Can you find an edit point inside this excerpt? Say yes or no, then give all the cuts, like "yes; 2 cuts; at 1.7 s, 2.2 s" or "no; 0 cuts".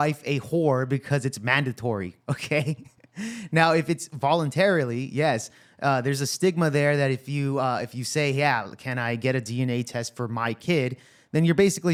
no; 0 cuts